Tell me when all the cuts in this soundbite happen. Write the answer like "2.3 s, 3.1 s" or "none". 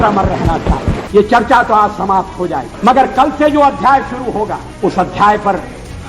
1.0 s, 2.7 s, 4.6 s